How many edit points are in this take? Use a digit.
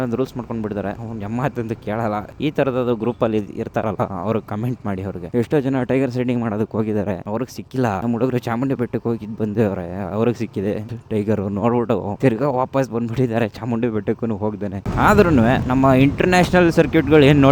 2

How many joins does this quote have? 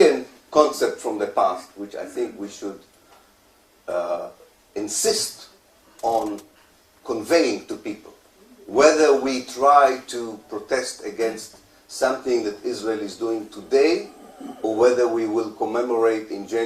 1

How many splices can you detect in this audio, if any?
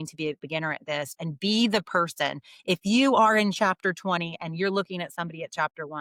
0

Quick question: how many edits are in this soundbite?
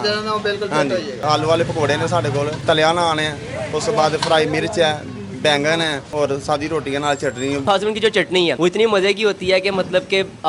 4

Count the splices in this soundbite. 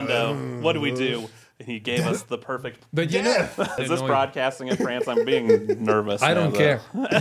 1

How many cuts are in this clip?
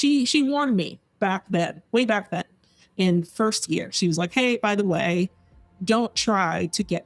0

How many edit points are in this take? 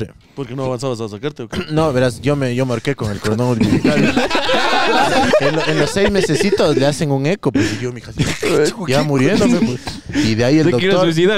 1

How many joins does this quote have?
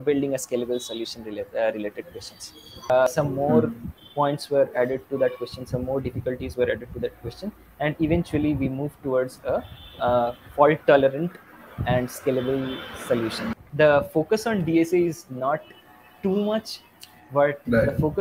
2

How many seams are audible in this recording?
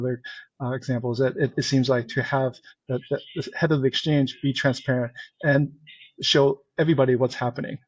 0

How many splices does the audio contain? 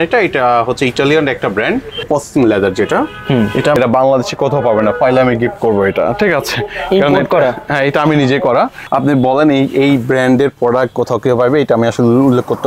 3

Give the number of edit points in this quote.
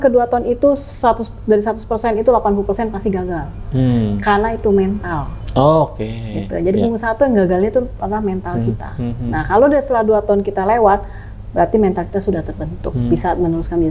0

